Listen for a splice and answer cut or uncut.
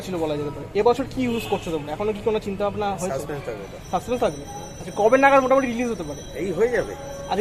uncut